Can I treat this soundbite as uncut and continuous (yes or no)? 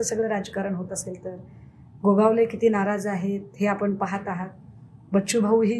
yes